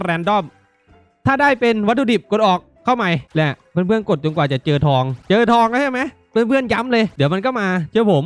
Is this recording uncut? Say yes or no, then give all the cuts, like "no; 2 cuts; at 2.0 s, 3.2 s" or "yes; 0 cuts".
no; 3 cuts; at 3.3 s, 5.2 s, 7.1 s